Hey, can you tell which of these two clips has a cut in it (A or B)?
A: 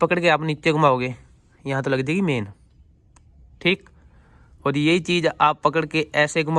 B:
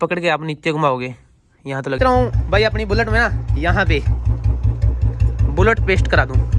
B